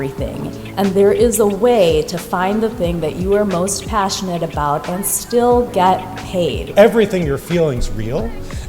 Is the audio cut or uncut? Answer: cut